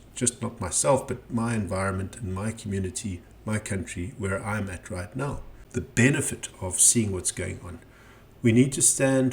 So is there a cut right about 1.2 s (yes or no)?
no